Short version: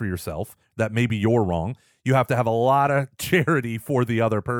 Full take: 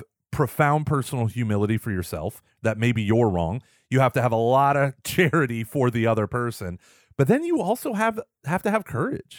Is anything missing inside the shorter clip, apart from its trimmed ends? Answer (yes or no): no